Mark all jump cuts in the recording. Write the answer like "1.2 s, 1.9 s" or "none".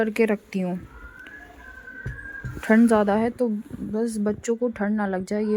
none